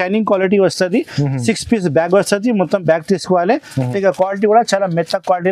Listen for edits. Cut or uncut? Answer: cut